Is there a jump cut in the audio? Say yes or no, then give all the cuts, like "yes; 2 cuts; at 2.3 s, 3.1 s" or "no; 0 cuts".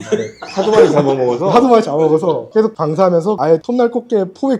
no; 0 cuts